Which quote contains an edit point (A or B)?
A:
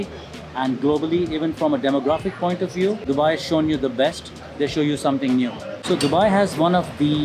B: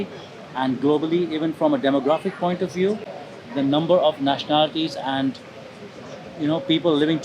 A